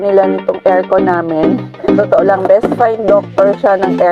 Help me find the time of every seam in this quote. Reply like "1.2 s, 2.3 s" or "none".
2.0 s

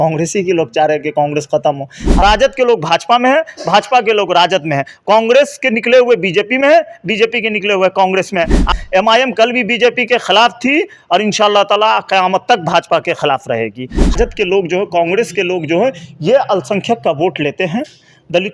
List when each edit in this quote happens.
2.2 s, 8.7 s, 14.1 s

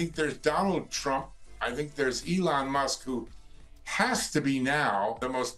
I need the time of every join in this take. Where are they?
none

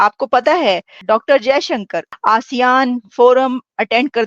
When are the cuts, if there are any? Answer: 1.0 s, 2.1 s

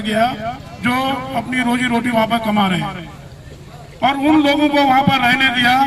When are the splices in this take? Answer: none

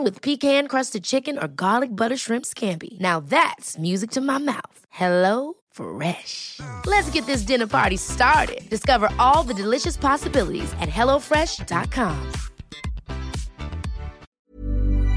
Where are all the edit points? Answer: 14.2 s

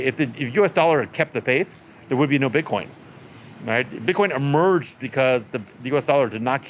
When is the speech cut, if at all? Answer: none

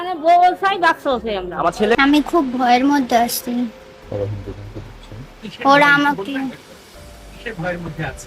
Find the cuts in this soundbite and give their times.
2.0 s

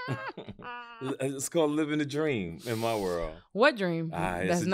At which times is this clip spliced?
none

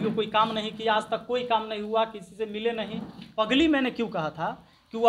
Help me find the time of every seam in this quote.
3.3 s

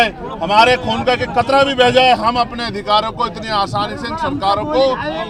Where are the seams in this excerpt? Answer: none

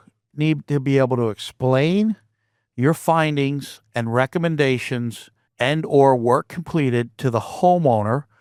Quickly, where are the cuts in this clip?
none

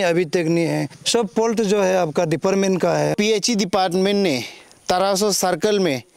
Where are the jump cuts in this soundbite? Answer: 0.9 s, 3.1 s

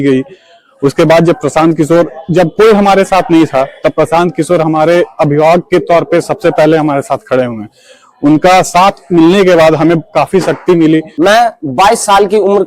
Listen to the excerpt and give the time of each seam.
11.1 s

